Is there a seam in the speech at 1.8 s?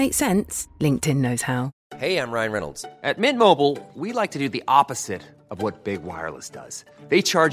yes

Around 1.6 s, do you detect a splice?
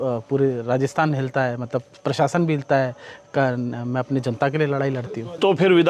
no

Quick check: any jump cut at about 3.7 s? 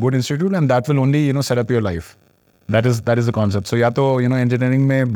no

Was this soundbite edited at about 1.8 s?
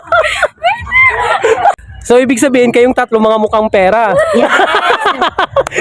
yes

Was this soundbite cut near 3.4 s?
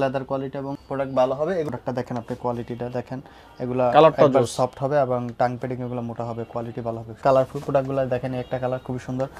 no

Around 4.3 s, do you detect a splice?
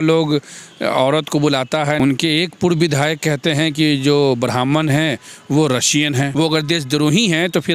no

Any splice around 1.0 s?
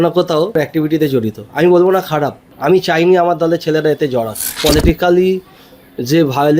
no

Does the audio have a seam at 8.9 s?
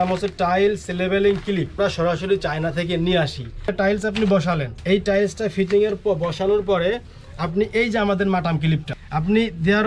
yes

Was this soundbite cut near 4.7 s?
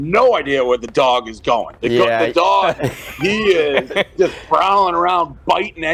no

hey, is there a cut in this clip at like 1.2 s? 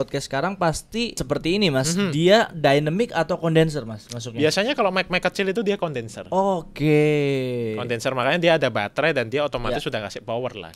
yes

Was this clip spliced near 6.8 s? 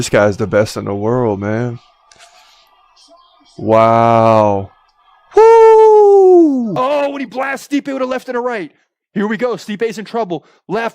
yes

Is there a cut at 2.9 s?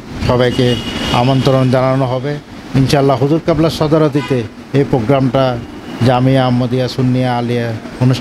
no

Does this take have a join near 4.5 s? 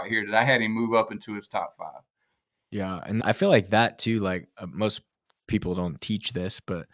no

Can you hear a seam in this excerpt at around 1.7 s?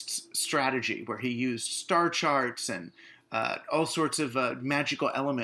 no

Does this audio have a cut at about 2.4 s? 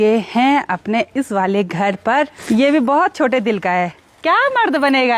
yes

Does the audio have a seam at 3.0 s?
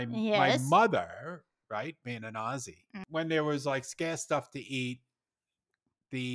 yes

